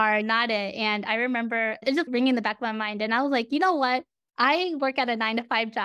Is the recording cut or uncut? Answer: cut